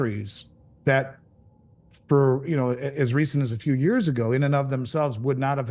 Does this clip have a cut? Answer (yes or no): no